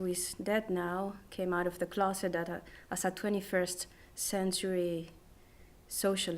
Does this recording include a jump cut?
yes; 1 cut; at 2.5 s

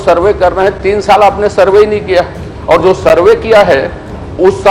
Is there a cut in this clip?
no; 0 cuts

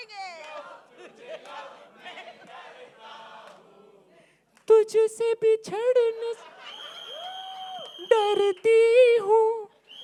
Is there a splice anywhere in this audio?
no; 0 cuts

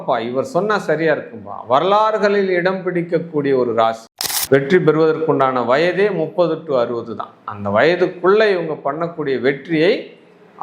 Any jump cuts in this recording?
yes; 1 cut; at 4.0 s

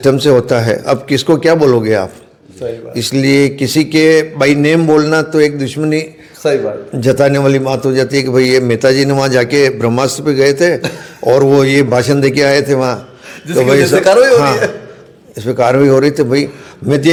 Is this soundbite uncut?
yes; 0 cuts

